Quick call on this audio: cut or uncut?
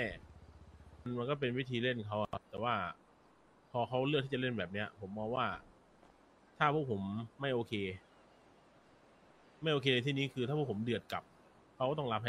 cut